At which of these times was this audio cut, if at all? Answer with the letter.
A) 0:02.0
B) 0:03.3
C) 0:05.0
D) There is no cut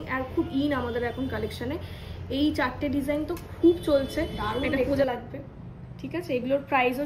C